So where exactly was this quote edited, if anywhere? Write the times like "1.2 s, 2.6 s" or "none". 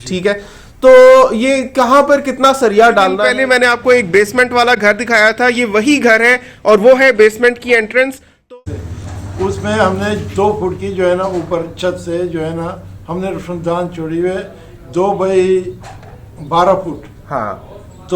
3.2 s, 8.5 s

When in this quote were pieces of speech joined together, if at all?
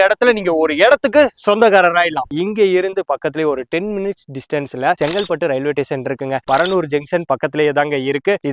2.3 s, 6.4 s

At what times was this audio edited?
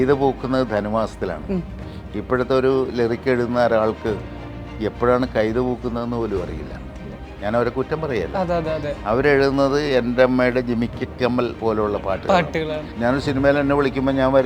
12.9 s

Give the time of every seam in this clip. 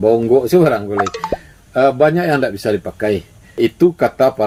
none

